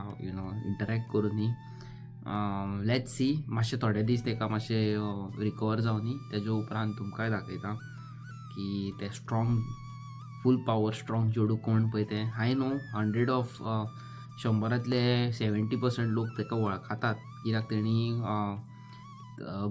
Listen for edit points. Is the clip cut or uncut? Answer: uncut